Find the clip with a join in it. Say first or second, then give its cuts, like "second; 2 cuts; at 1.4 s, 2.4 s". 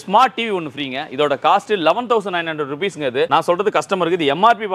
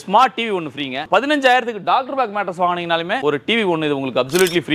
second; 1 cut; at 1.0 s